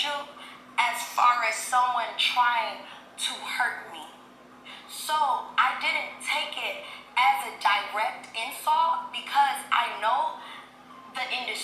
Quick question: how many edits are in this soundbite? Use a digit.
0